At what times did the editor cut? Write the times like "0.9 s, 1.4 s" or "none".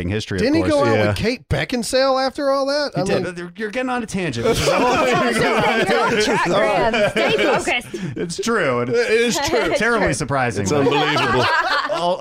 none